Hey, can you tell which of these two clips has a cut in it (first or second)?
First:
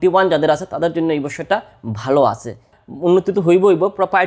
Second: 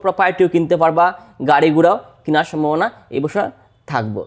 first